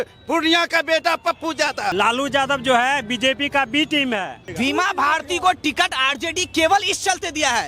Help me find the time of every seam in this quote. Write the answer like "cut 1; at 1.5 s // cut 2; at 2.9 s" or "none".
cut 1; at 1.9 s // cut 2; at 4.4 s